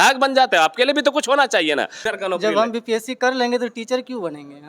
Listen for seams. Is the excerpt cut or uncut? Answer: cut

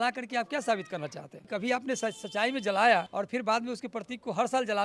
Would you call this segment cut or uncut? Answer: cut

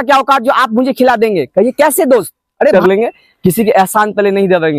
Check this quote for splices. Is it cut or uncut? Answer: cut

